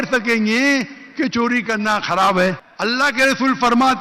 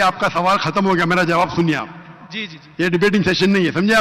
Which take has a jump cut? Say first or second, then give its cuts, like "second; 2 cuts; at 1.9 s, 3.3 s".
first; 1 cut; at 2.7 s